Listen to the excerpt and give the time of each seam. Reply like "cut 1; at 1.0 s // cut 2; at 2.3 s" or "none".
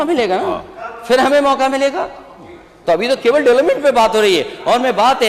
none

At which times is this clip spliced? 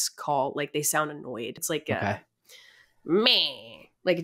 cut 1; at 1.6 s

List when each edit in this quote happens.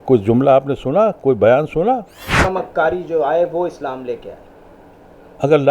cut 1; at 2.5 s

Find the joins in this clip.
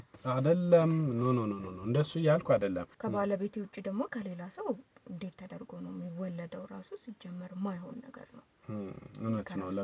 cut 1; at 2.9 s

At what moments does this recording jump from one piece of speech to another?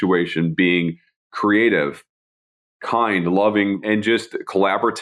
cut 1; at 3.8 s

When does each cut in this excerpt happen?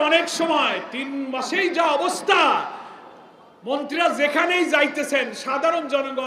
none

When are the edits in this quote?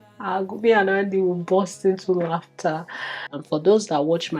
cut 1; at 3.3 s

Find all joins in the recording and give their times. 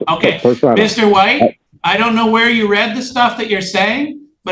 cut 1; at 1.7 s

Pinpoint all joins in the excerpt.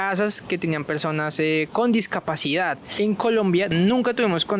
cut 1; at 2.9 s // cut 2; at 3.7 s

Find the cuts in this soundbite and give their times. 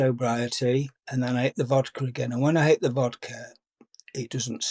none

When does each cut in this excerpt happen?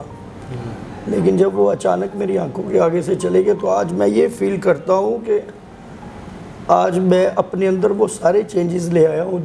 none

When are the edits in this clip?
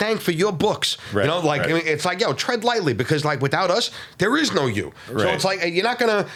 none

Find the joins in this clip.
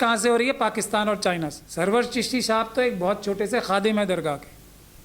cut 1; at 1.6 s

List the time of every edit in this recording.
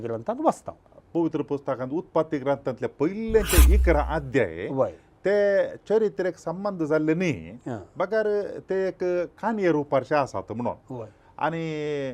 cut 1; at 0.9 s

